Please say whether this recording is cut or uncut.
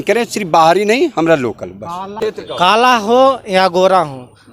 cut